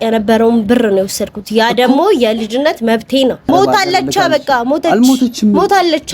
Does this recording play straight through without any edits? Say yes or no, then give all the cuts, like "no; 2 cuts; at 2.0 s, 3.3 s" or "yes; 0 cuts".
no; 1 cut; at 3.4 s